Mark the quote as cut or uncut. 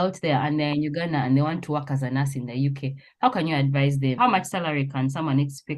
cut